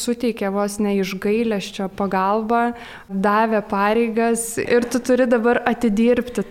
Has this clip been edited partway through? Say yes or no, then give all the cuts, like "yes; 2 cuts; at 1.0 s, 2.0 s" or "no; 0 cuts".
yes; 1 cut; at 4.7 s